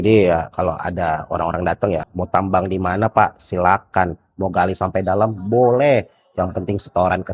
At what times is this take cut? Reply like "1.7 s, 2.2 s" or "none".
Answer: 2.1 s